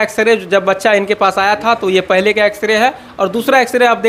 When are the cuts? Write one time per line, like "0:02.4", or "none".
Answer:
none